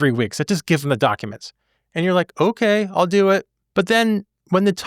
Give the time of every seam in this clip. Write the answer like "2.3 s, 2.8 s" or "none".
3.6 s